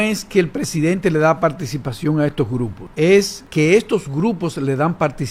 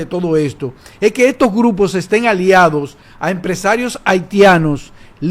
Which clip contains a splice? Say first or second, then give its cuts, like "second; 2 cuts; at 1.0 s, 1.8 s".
first; 2 cuts; at 2.8 s, 3.4 s